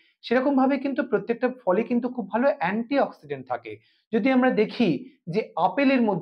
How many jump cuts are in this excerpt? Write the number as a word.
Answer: zero